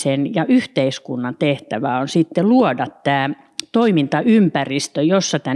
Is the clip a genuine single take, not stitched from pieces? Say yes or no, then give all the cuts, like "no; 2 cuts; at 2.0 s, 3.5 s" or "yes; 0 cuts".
yes; 0 cuts